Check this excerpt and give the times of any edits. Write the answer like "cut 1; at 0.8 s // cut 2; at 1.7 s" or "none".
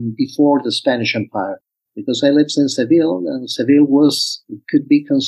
cut 1; at 1.7 s

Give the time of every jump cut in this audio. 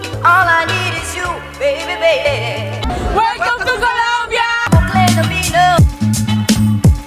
none

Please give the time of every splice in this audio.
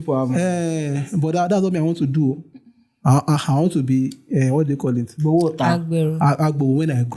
none

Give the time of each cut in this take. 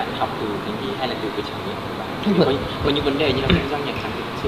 cut 1; at 1.3 s

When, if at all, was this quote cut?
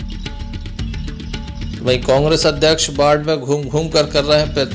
none

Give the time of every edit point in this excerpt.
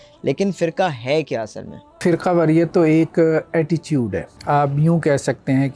cut 1; at 2.0 s // cut 2; at 4.3 s

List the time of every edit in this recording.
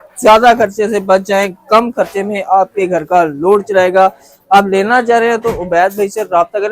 none

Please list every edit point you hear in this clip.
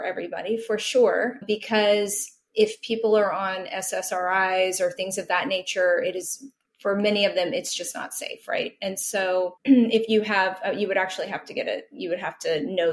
cut 1; at 1.4 s

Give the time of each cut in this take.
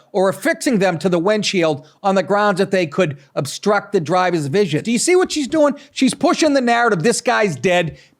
cut 1; at 4.8 s

